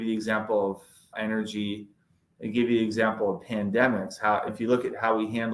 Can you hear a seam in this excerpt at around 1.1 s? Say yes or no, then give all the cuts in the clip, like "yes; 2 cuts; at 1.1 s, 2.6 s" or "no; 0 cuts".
yes; 2 cuts; at 1.1 s, 4.5 s